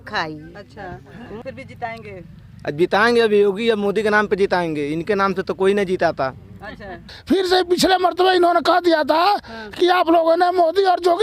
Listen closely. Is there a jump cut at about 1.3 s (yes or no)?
yes